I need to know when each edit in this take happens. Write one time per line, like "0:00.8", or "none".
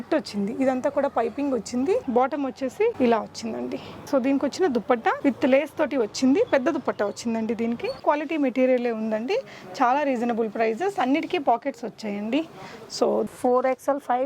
0:02.4
0:05.2
0:08.0
0:13.3